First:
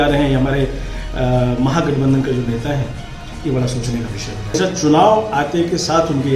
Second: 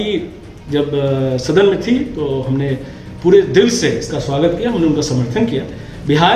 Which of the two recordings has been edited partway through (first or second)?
first